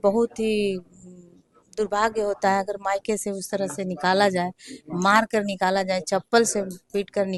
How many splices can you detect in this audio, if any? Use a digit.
0